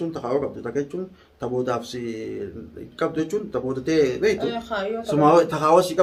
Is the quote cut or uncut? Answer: uncut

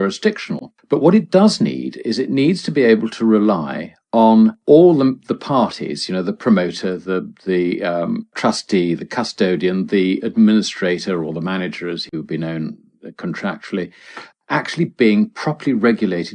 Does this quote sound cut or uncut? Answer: uncut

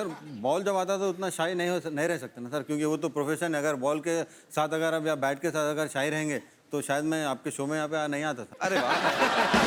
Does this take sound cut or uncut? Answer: uncut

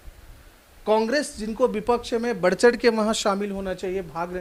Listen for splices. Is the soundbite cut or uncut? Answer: uncut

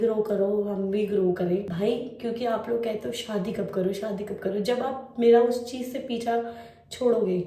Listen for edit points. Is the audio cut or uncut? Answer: uncut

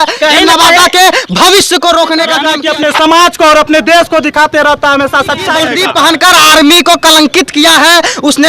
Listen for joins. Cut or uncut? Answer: cut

